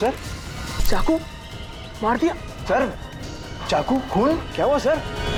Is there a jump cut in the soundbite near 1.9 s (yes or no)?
no